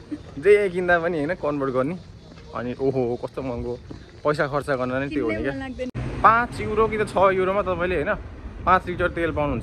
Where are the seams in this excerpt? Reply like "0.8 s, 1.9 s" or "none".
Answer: 6.0 s